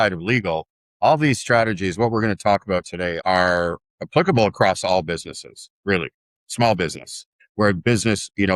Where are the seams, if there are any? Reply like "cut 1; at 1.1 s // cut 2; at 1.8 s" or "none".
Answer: cut 1; at 3.2 s // cut 2; at 7.3 s